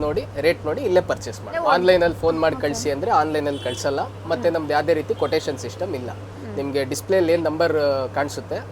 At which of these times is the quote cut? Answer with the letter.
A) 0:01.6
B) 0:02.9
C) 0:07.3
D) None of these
A